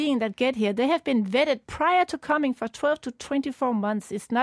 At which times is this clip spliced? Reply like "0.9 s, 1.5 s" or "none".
none